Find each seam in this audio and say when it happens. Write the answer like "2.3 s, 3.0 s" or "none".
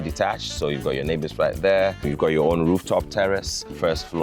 none